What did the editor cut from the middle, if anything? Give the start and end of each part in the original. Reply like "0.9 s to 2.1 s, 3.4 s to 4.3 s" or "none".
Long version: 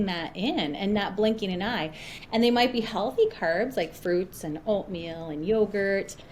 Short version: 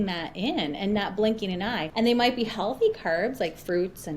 1.8 s to 2.2 s